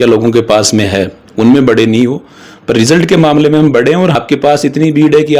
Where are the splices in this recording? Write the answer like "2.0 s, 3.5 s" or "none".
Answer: 4.1 s